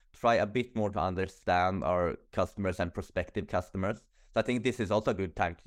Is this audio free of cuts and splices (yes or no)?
yes